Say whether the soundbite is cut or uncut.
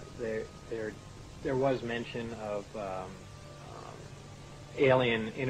cut